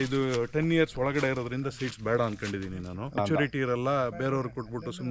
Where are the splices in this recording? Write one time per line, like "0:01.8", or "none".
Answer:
0:03.2